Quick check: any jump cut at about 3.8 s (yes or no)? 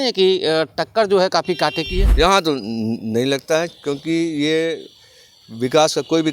no